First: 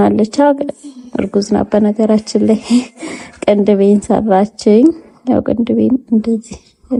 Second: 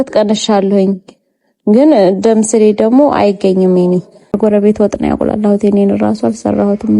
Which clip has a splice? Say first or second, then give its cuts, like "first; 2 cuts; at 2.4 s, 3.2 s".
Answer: second; 1 cut; at 4.4 s